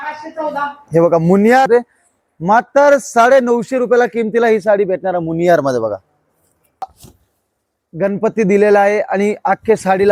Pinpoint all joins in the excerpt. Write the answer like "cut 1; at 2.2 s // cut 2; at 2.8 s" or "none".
cut 1; at 1.7 s // cut 2; at 7.0 s